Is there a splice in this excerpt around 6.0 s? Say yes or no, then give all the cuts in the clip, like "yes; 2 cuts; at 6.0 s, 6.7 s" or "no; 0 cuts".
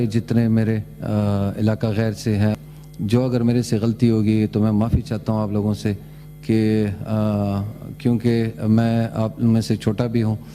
no; 1 cut; at 2.6 s